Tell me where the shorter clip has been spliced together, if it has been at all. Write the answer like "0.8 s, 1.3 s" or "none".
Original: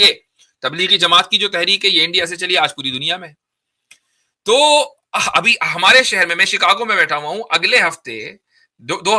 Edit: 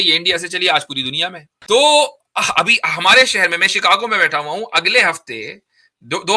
1.5 s